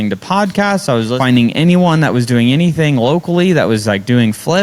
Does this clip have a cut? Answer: yes; 1 cut; at 1.1 s

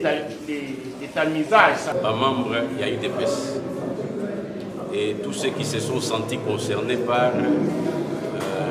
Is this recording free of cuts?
no; 1 cut; at 1.9 s

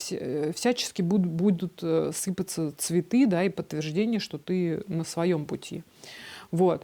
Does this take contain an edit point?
no; 0 cuts

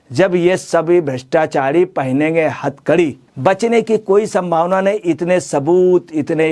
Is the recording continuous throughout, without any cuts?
no; 1 cut; at 3.2 s

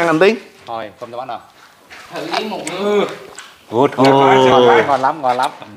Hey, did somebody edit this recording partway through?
no; 0 cuts

